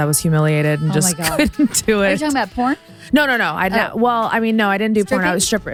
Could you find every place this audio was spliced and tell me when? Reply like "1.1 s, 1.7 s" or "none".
none

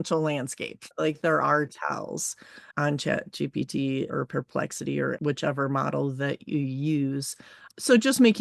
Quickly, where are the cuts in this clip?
0.9 s, 5.2 s

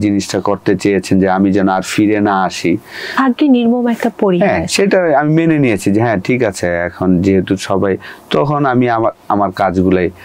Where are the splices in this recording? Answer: none

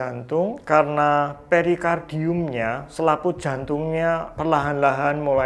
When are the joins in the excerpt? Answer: 4.3 s

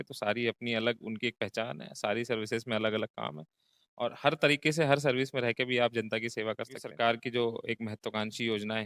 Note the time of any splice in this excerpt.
6.8 s

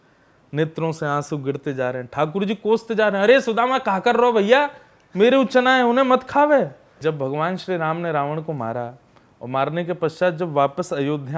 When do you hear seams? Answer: 7.0 s

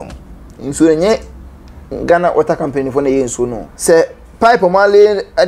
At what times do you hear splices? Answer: 3.7 s

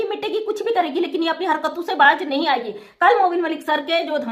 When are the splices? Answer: none

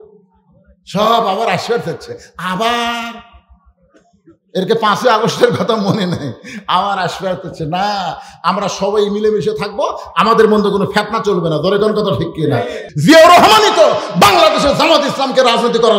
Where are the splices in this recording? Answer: 12.8 s

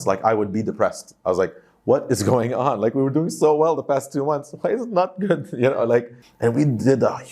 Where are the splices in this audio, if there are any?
6.2 s

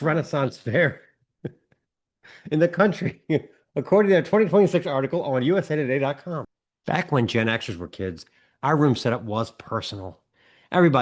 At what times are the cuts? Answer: 6.5 s

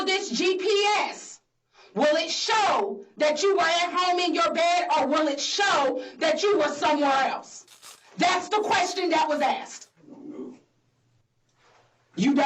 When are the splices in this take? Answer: none

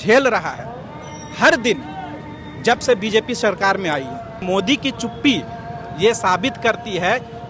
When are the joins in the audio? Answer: 4.4 s

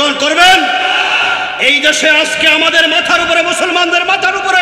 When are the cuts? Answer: none

